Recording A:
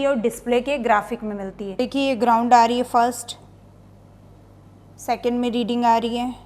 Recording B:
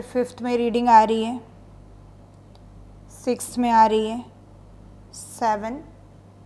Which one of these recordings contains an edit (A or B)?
A